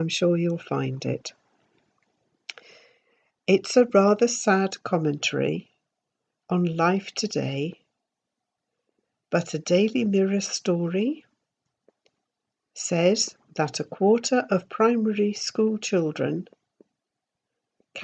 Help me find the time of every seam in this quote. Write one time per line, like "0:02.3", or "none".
0:13.5

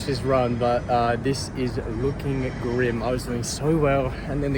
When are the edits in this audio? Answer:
none

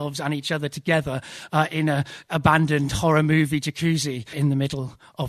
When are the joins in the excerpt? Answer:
0:04.3

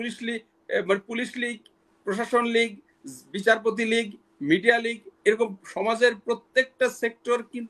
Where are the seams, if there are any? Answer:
none

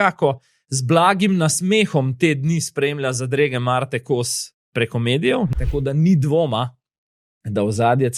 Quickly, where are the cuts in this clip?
0:05.5

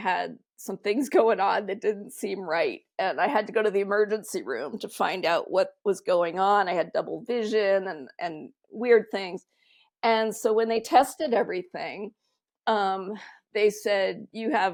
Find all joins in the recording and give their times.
none

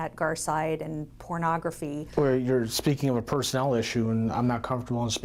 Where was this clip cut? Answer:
0:02.1

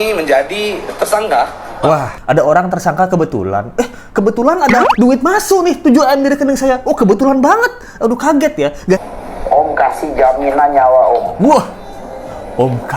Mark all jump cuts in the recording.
0:02.1
0:09.0

